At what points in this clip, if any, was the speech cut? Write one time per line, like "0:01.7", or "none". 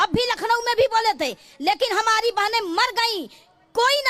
none